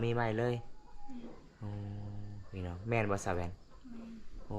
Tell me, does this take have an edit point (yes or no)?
no